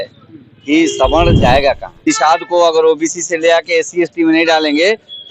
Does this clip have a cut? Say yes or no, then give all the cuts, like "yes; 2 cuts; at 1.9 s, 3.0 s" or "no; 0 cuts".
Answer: yes; 1 cut; at 2.0 s